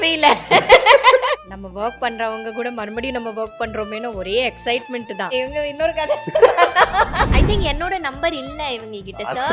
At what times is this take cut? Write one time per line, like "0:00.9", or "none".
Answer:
0:01.4
0:05.3
0:07.3